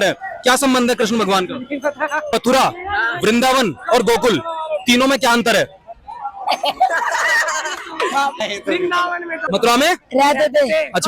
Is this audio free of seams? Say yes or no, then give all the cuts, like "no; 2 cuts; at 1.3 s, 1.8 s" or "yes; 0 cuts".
no; 3 cuts; at 2.2 s, 8.4 s, 9.4 s